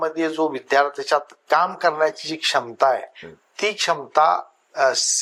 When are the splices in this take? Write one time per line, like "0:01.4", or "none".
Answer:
none